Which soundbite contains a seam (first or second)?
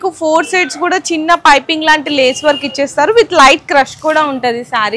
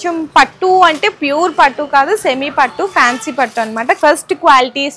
second